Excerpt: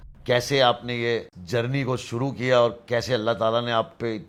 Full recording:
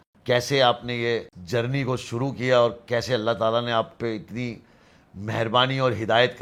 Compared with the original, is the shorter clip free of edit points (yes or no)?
yes